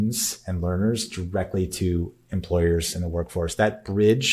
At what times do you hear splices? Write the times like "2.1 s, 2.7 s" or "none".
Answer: none